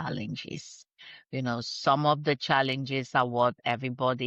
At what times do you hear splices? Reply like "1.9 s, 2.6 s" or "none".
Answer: none